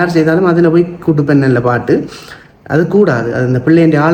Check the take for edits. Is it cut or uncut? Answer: uncut